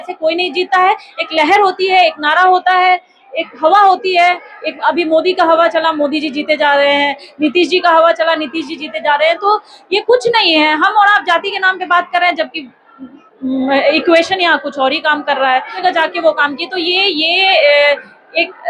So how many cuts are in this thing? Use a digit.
1